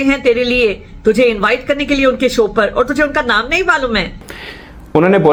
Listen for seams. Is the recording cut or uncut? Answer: uncut